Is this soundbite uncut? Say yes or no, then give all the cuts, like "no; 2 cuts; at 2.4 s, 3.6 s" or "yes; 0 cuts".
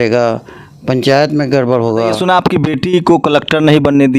no; 1 cut; at 2.2 s